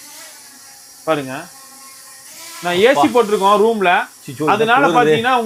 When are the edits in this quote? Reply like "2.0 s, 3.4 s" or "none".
none